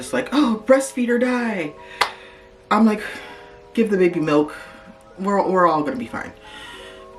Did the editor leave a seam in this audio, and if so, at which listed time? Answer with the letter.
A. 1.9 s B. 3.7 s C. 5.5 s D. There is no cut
D